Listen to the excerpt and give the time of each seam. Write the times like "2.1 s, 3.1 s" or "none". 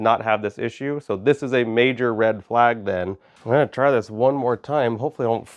3.3 s